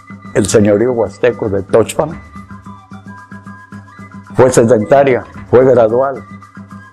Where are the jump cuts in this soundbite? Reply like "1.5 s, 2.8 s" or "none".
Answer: none